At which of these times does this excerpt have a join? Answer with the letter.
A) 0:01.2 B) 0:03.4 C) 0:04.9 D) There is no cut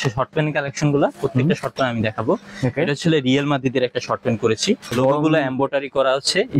C